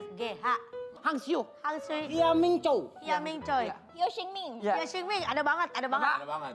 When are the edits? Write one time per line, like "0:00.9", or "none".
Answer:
0:01.0